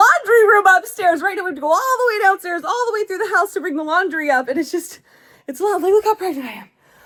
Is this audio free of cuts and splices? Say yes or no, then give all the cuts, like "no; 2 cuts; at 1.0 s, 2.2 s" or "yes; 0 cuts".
yes; 0 cuts